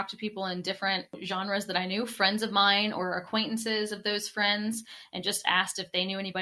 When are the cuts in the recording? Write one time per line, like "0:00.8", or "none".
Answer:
0:01.2